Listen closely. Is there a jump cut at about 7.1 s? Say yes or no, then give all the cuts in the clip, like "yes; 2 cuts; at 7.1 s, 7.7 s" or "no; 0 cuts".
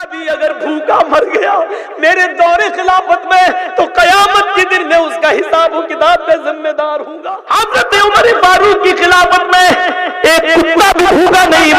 yes; 1 cut; at 7.1 s